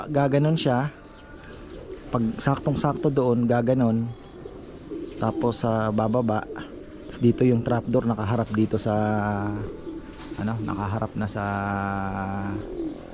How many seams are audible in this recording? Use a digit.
0